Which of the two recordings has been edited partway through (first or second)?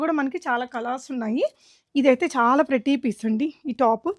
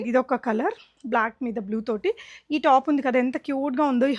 first